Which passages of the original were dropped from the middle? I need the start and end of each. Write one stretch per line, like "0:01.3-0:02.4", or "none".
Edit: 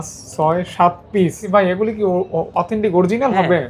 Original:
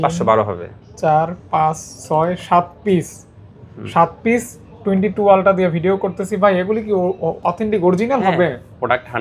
0:03.1-0:06.3